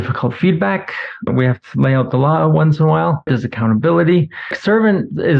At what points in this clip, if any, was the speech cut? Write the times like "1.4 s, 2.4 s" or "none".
1.3 s, 3.3 s, 4.6 s